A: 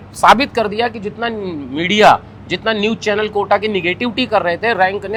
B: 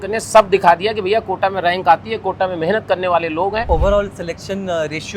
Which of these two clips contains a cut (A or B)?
B